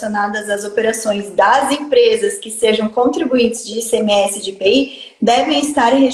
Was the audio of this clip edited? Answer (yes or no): no